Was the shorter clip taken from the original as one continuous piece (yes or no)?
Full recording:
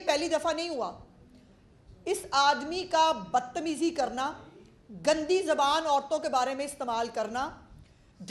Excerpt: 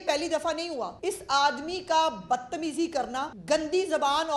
no